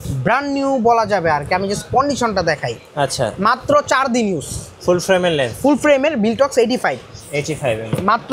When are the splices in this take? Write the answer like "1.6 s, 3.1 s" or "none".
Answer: none